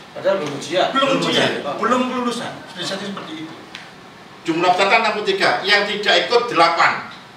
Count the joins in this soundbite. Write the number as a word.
one